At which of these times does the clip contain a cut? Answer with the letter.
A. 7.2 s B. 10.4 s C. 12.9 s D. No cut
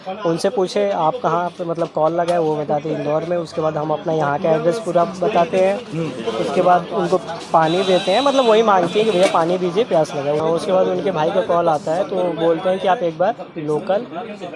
B